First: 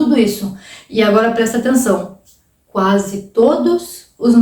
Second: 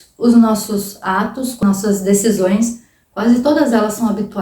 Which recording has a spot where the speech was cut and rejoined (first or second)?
second